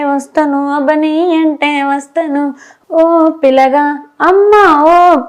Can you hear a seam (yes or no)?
yes